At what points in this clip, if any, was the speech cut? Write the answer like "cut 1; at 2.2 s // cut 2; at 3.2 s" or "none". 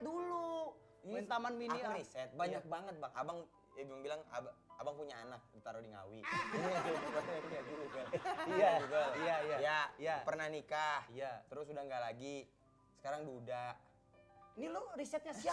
none